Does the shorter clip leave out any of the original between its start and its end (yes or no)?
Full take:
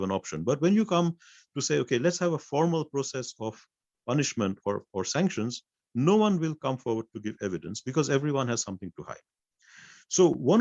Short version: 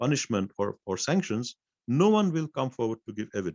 no